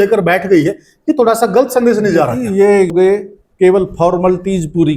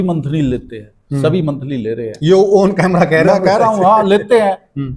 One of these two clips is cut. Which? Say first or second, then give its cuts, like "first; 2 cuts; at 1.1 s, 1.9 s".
first; 1 cut; at 2.9 s